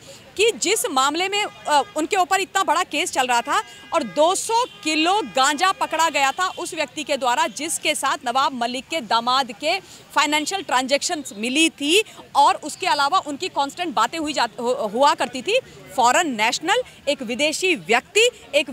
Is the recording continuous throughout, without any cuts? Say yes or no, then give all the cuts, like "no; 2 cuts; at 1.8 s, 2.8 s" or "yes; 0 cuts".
yes; 0 cuts